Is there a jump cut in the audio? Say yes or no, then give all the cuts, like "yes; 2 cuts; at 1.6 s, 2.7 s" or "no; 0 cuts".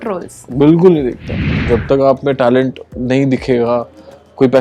yes; 1 cut; at 1.5 s